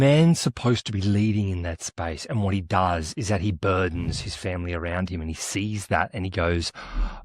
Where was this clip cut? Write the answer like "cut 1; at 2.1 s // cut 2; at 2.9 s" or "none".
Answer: none